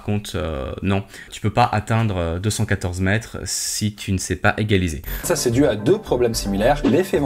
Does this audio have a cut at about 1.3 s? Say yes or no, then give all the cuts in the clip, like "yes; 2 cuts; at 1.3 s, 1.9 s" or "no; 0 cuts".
yes; 2 cuts; at 1.3 s, 5.3 s